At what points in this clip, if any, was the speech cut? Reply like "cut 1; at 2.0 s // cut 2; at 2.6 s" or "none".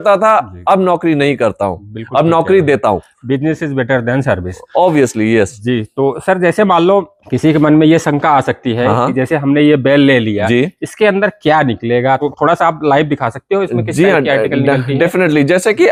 none